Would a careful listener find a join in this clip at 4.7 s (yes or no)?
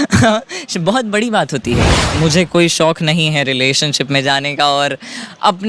no